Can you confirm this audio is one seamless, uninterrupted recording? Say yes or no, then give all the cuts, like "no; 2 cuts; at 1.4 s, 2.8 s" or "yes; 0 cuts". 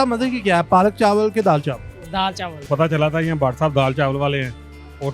no; 1 cut; at 2.5 s